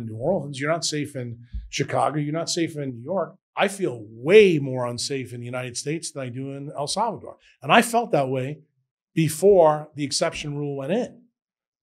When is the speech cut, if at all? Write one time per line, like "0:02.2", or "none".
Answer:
0:03.3